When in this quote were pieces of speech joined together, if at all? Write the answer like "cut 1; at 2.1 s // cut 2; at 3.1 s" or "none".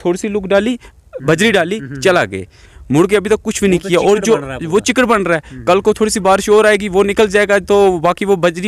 none

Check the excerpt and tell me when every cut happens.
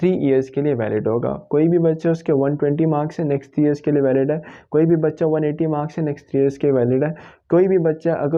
none

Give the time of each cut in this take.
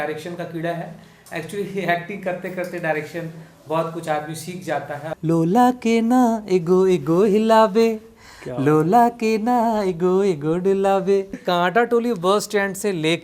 cut 1; at 5.1 s // cut 2; at 11.4 s

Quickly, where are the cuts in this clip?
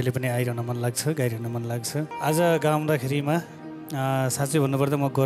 cut 1; at 2.1 s

